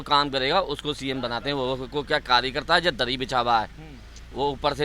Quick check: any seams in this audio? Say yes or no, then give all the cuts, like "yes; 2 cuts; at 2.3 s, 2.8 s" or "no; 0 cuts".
no; 0 cuts